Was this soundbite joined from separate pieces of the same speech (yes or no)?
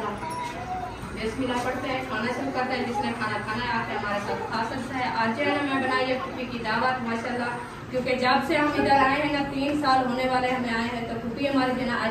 no